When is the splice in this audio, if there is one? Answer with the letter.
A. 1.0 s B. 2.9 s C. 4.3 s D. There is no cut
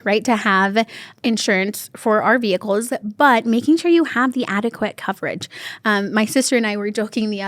A